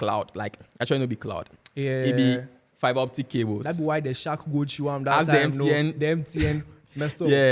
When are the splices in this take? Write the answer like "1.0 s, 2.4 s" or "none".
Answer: none